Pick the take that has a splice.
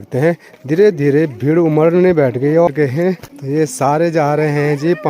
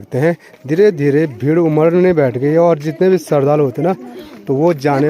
first; 1 cut; at 2.7 s

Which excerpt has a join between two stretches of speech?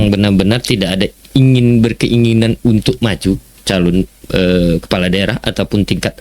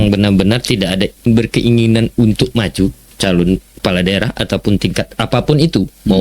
second; 2 cuts; at 1.3 s, 3.8 s

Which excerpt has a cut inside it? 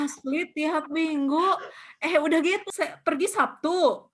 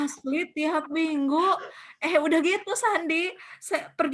first; 1 cut; at 2.7 s

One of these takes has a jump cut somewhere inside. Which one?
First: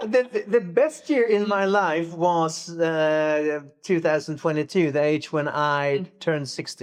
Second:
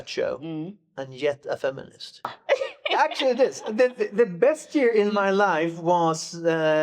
second; 1 cut; at 2.4 s

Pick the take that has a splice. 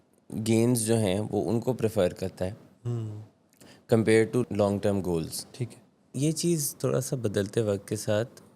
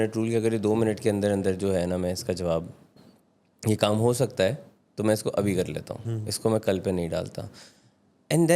first; 2 cuts; at 4.4 s, 6.1 s

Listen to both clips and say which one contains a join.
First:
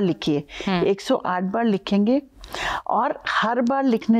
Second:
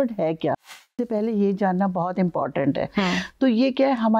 second; 1 cut; at 0.9 s

